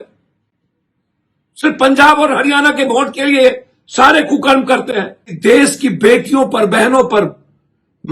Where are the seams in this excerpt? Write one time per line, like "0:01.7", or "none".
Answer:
0:05.3